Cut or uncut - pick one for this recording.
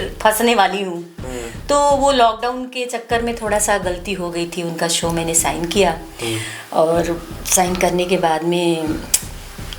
uncut